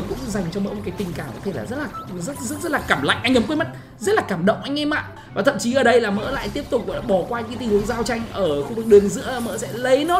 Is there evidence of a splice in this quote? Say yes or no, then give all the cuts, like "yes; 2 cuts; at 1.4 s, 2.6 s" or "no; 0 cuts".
yes; 1 cut; at 5.2 s